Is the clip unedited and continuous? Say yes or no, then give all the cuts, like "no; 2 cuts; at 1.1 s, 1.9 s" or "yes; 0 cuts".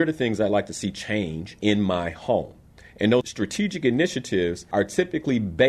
no; 3 cuts; at 1.4 s, 3.3 s, 4.6 s